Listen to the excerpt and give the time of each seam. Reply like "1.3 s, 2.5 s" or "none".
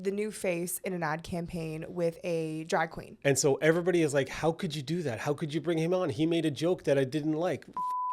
3.0 s